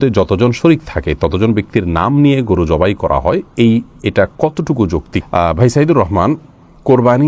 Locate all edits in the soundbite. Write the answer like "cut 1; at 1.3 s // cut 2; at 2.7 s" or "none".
none